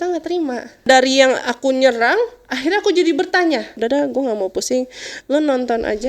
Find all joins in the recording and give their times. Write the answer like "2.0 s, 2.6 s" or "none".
0.9 s, 3.8 s

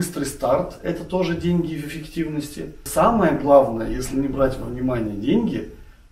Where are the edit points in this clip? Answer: 2.8 s

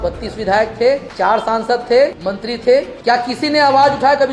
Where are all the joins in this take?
1.1 s, 2.6 s

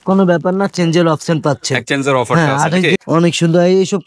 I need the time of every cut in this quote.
3.0 s

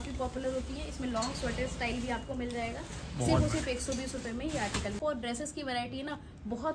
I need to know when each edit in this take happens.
5.0 s

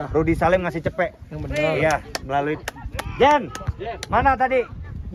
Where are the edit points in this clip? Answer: none

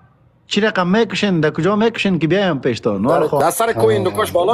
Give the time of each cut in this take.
3.4 s

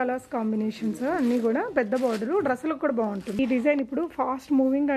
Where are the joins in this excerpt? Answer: 3.4 s

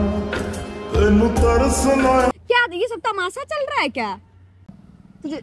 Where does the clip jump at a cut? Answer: 2.4 s

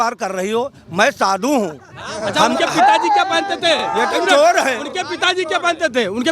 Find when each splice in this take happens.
none

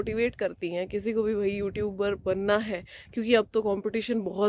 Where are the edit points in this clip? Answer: none

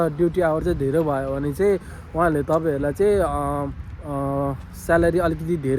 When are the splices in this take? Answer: none

